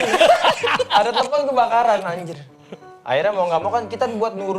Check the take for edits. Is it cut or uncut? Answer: uncut